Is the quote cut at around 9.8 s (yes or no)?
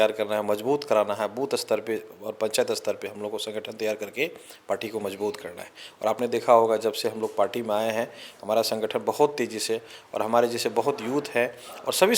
no